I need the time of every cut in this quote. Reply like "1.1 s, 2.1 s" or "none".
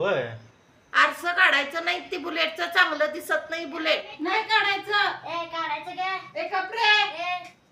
4.1 s